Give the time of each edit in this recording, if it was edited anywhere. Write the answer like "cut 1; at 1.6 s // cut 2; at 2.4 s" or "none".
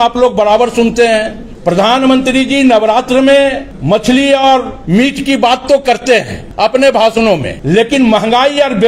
cut 1; at 1.4 s // cut 2; at 3.7 s // cut 3; at 4.8 s // cut 4; at 6.4 s // cut 5; at 7.5 s